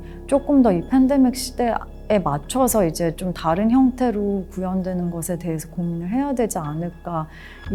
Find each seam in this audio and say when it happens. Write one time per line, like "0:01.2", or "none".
none